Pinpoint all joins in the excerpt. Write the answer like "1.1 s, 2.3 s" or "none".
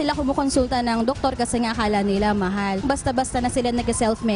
2.8 s